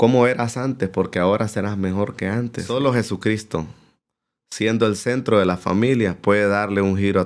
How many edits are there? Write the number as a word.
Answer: one